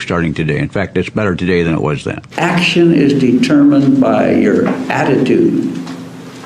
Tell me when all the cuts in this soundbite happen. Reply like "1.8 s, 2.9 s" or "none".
2.2 s